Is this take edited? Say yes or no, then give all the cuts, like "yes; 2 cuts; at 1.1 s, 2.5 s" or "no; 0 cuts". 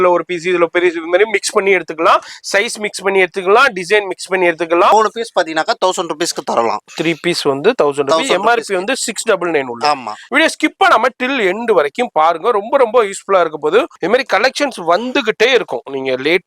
yes; 3 cuts; at 4.9 s, 10.2 s, 14.0 s